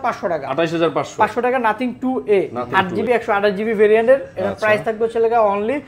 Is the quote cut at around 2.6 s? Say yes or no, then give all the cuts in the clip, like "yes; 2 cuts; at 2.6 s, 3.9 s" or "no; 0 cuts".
yes; 1 cut; at 2.6 s